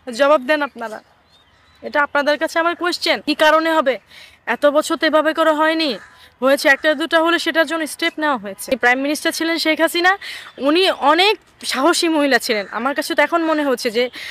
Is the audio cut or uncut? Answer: cut